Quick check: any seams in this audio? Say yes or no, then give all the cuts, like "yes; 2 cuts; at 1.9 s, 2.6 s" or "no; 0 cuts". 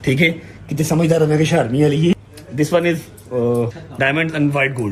yes; 2 cuts; at 2.1 s, 3.8 s